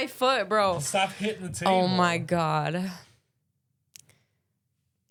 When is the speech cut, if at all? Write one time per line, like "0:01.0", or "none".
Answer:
none